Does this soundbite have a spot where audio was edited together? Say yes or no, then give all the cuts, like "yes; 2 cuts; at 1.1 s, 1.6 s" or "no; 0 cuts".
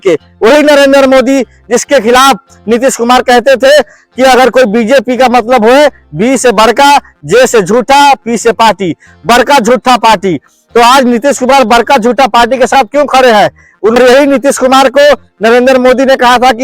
yes; 1 cut; at 14.0 s